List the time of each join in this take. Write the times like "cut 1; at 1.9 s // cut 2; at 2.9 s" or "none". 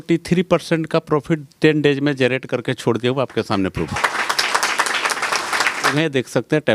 cut 1; at 3.9 s // cut 2; at 5.9 s